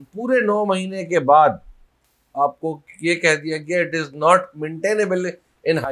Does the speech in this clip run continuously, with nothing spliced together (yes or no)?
yes